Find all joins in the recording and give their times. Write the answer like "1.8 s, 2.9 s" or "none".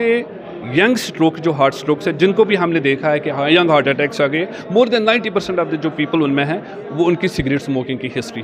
none